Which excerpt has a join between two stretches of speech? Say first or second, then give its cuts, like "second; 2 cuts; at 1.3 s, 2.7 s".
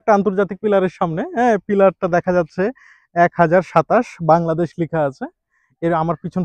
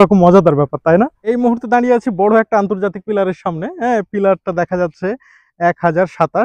second; 1 cut; at 1.2 s